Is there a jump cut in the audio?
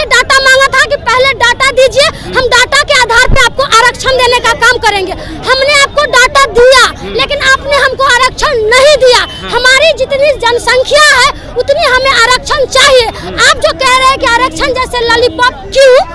no; 0 cuts

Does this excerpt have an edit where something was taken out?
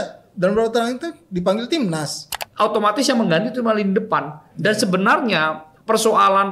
yes; 1 cut; at 2.2 s

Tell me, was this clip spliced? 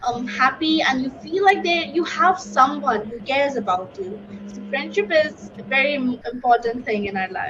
no; 0 cuts

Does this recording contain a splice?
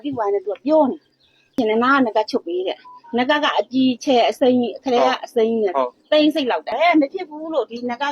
yes; 2 cuts; at 1.6 s, 6.7 s

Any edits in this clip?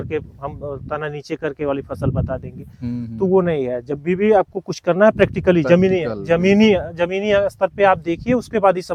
no; 0 cuts

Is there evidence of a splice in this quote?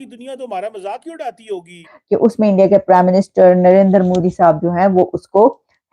yes; 1 cut; at 1.9 s

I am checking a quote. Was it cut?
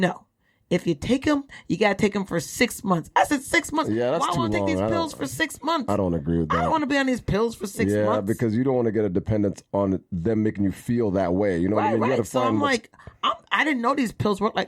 no; 0 cuts

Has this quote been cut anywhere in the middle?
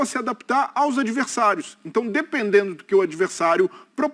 no; 0 cuts

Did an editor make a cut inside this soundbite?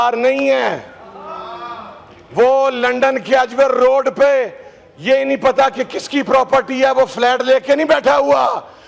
no; 0 cuts

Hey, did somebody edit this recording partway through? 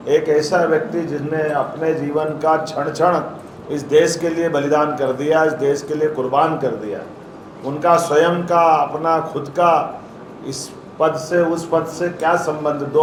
no; 0 cuts

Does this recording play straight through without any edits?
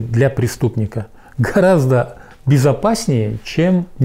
yes; 0 cuts

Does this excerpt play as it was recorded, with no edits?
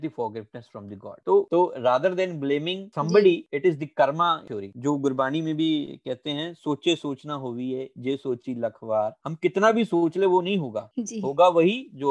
yes; 0 cuts

